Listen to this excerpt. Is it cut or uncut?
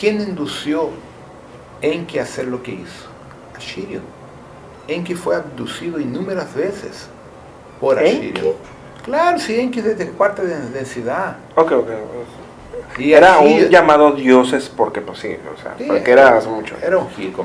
uncut